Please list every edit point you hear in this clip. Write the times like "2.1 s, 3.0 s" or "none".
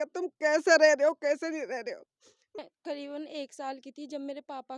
2.6 s